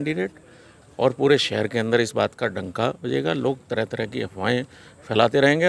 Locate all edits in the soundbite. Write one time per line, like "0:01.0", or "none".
none